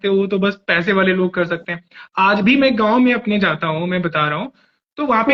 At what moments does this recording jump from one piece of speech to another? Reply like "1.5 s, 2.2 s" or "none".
none